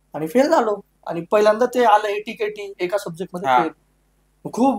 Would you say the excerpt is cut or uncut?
uncut